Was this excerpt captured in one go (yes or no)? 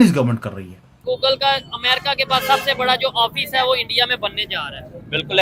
no